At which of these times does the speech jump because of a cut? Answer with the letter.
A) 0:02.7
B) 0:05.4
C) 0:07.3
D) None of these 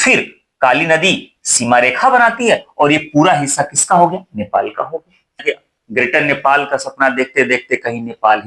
B